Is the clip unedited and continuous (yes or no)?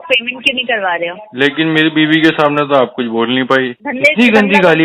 no